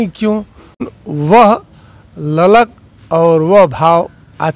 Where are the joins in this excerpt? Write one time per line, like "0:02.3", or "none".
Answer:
0:00.9